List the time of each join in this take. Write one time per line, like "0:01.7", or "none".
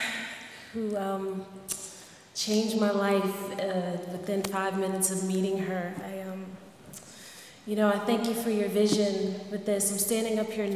none